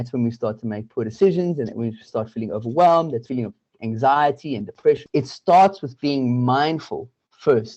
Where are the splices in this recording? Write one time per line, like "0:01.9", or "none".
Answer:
0:03.3
0:05.0

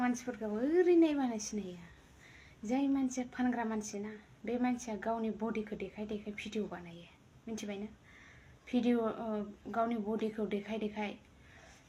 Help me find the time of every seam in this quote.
none

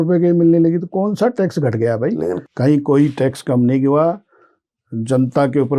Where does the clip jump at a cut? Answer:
0:02.4

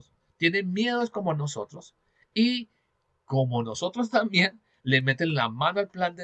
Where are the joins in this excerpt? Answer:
none

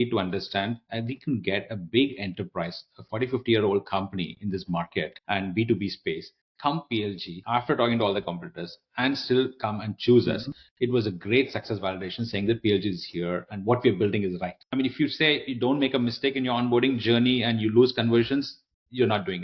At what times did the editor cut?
0:05.2
0:07.3
0:14.8

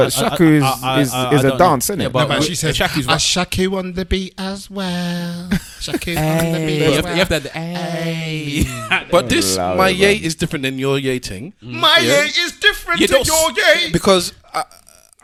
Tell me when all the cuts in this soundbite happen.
none

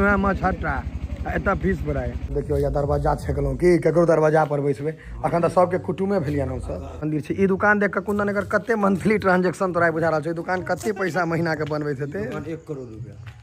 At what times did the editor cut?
0:02.2
0:07.0

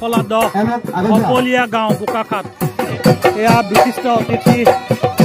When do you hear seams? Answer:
0:02.9

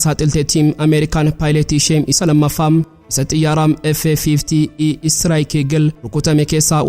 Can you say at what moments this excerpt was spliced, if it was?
none

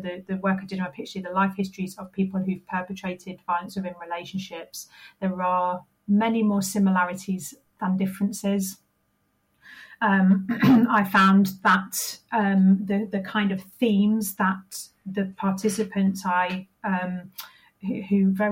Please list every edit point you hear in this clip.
none

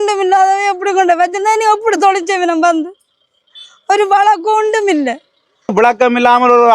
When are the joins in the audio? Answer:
0:05.7

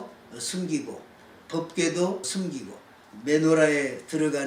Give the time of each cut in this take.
0:01.4
0:02.5

